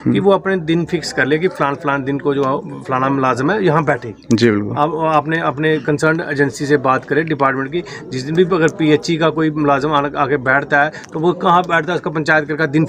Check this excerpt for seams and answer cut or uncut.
uncut